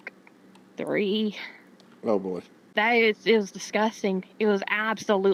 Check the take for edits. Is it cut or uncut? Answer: uncut